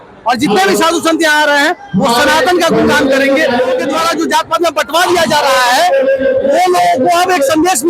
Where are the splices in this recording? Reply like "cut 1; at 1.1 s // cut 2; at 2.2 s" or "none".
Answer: cut 1; at 3.9 s